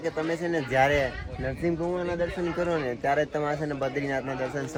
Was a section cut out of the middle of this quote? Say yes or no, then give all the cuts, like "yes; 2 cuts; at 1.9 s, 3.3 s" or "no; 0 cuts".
no; 0 cuts